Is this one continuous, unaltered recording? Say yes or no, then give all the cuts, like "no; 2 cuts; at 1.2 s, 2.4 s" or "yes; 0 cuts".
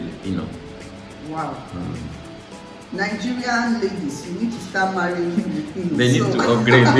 yes; 0 cuts